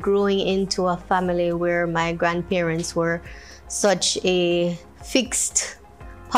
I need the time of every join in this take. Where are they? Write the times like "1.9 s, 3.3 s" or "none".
none